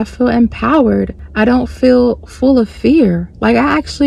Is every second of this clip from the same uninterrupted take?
yes; 0 cuts

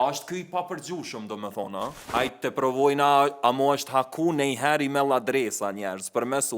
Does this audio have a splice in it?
yes; 1 cut; at 2.1 s

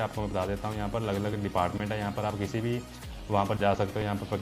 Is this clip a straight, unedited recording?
yes; 0 cuts

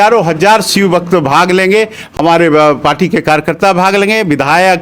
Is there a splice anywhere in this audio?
no; 0 cuts

